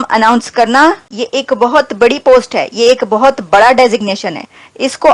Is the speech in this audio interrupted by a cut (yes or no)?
yes